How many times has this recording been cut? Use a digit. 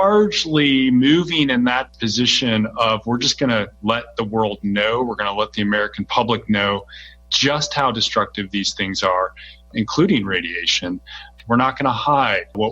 3